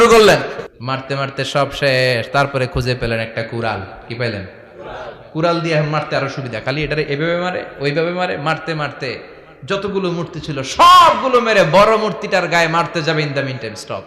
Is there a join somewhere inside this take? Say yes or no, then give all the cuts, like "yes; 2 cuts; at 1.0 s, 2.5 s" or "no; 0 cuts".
yes; 1 cut; at 1.0 s